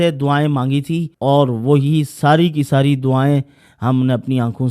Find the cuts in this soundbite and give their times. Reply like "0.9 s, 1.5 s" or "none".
1.1 s